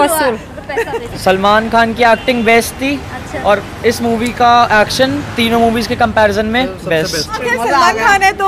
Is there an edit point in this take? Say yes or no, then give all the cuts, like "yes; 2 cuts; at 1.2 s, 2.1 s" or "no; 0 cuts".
yes; 2 cuts; at 1.0 s, 7.4 s